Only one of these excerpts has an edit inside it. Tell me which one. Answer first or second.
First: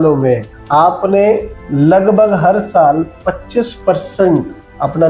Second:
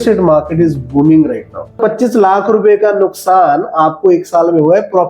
second